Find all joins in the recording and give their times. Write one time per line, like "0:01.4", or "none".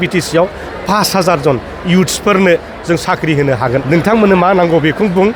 0:03.8